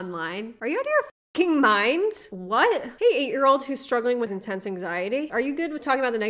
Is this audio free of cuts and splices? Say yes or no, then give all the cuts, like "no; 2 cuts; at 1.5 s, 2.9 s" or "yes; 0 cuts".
no; 1 cut; at 4.4 s